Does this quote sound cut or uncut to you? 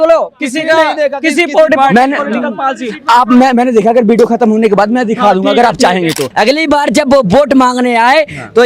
cut